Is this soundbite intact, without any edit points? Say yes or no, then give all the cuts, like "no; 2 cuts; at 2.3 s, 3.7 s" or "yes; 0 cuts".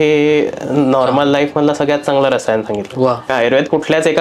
no; 1 cut; at 3.3 s